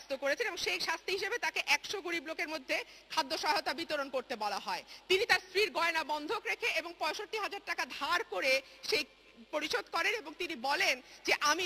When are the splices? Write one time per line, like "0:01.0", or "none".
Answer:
none